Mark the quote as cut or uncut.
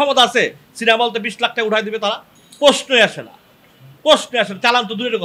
uncut